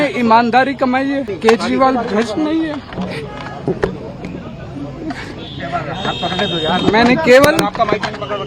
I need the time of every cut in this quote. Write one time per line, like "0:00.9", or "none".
0:01.4